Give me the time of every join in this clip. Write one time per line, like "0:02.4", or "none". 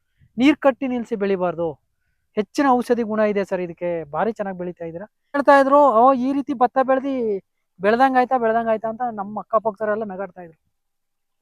0:05.4